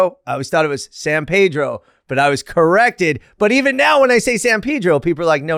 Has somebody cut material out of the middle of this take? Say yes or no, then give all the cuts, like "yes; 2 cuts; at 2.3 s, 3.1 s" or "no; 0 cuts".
no; 0 cuts